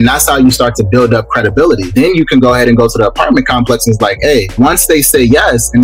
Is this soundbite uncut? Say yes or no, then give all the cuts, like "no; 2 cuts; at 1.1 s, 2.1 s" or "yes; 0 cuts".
no; 2 cuts; at 1.9 s, 4.6 s